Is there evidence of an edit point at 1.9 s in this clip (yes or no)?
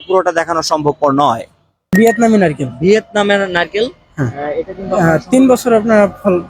yes